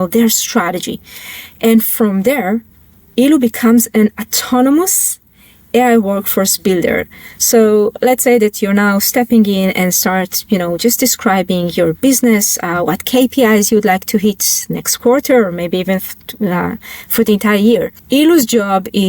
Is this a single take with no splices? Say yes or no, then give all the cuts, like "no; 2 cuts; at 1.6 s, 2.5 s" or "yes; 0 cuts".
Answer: no; 1 cut; at 18.0 s